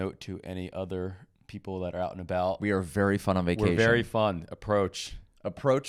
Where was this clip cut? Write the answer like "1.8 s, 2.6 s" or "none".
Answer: none